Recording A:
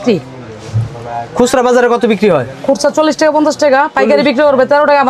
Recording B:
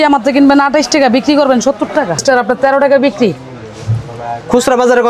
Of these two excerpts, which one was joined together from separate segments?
B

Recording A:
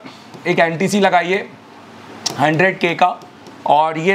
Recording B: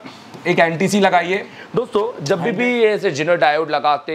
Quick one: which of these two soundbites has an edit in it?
B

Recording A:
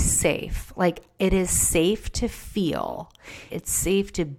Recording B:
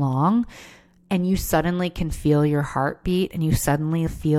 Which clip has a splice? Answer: A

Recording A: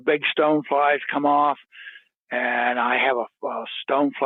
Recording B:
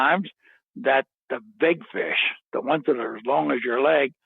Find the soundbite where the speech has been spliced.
B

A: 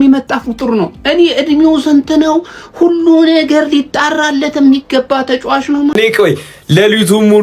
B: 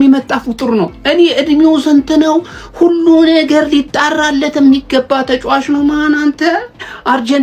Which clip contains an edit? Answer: A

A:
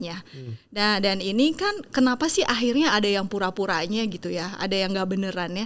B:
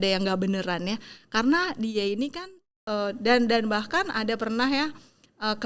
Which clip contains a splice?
B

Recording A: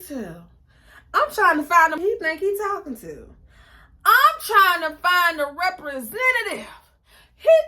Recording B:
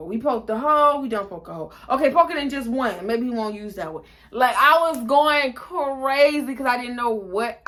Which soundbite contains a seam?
A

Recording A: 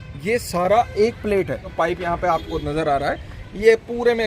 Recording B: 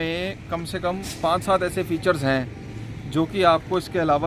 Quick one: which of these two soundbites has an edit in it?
A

